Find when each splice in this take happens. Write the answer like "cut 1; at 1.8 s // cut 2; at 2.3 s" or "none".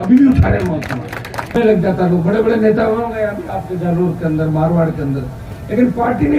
cut 1; at 1.5 s